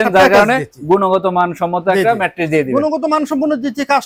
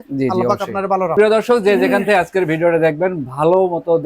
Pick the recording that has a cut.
second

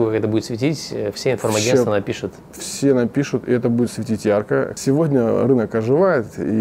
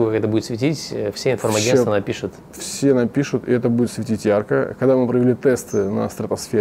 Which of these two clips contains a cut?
first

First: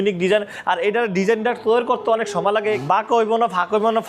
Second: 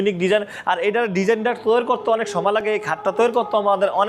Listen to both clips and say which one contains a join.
first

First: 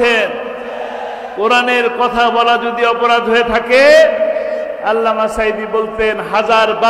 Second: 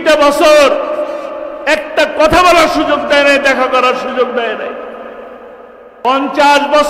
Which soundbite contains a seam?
second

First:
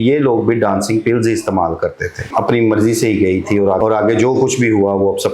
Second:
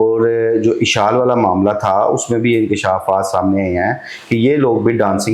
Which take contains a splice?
first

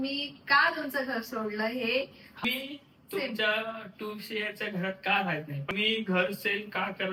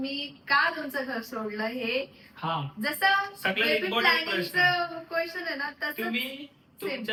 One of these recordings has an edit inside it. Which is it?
first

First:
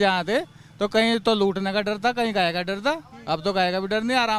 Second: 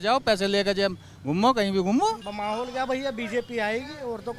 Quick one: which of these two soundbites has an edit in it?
second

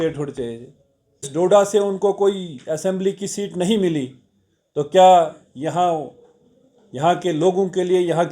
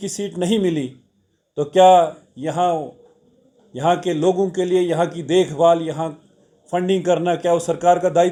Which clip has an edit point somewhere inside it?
first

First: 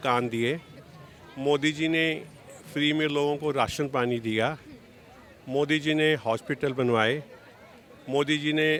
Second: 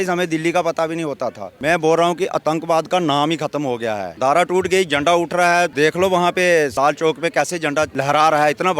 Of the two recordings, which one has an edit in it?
second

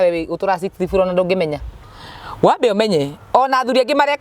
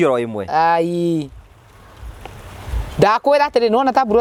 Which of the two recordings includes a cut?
first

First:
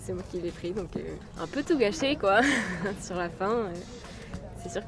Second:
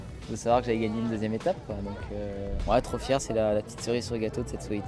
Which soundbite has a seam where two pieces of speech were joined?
second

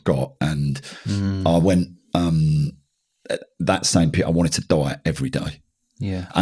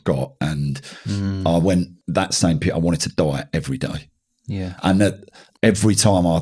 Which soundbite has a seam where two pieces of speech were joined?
second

